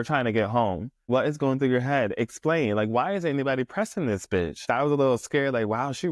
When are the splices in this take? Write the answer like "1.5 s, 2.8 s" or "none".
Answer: 1.1 s, 4.6 s

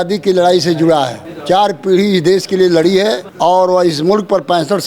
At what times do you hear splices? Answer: 1.3 s, 3.3 s

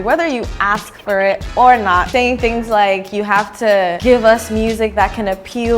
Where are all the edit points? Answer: 2.1 s, 4.0 s

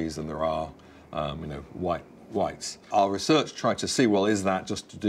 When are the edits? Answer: 2.7 s

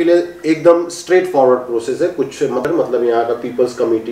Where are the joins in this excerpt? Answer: 2.6 s

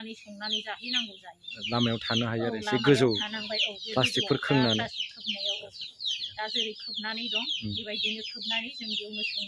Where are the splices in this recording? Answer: none

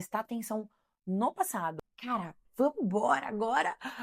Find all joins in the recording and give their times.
1.9 s

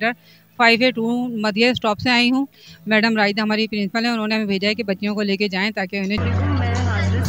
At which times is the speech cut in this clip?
6.2 s

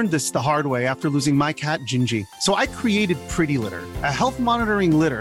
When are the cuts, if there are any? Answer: none

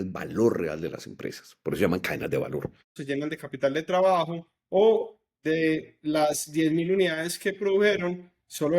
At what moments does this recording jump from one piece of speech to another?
3.0 s

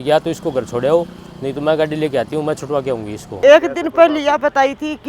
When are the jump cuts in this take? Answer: 3.3 s

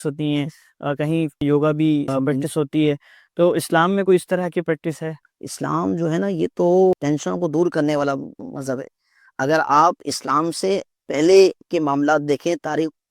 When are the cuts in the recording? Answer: 1.4 s, 2.1 s, 5.2 s, 7.0 s

